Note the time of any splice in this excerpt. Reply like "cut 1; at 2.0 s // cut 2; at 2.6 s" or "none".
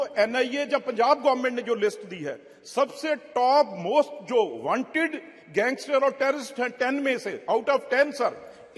none